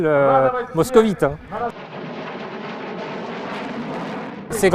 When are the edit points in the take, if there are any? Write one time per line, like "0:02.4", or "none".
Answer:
none